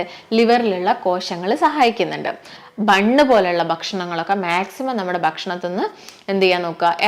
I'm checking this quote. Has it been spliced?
yes; 1 cut; at 2.6 s

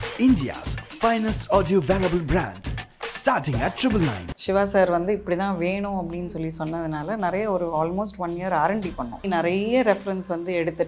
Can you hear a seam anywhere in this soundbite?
yes; 2 cuts; at 4.2 s, 9.3 s

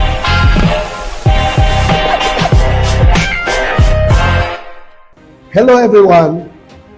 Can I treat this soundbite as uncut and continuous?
yes; 0 cuts

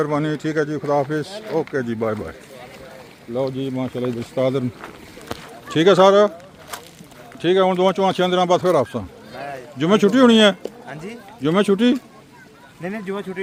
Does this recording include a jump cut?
no; 0 cuts

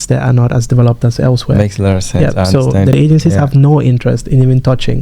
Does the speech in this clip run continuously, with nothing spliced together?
yes; 0 cuts

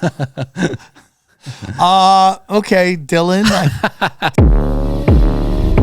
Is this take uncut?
no; 1 cut; at 4.2 s

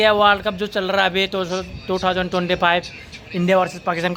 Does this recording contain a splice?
no; 0 cuts

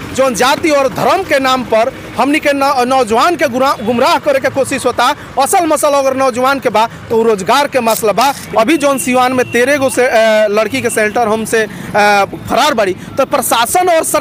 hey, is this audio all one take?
no; 1 cut; at 8.4 s

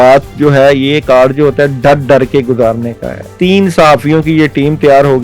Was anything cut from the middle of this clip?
yes; 1 cut; at 3.3 s

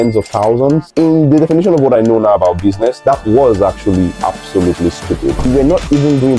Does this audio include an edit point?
yes; 1 cut; at 5.4 s

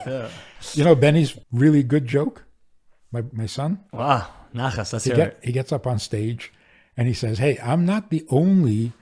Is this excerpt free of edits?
no; 1 cut; at 1.4 s

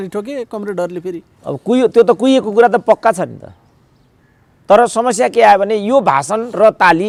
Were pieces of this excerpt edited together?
no; 0 cuts

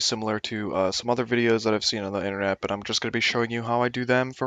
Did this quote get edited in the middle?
no; 0 cuts

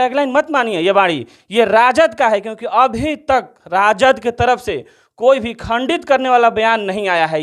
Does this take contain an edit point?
no; 0 cuts

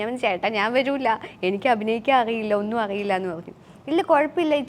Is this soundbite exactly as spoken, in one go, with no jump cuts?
yes; 0 cuts

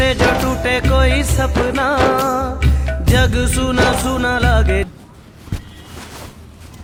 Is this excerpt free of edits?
yes; 0 cuts

